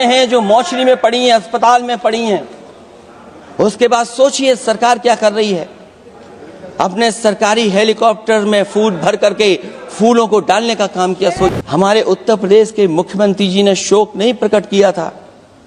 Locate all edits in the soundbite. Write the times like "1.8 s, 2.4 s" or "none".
11.5 s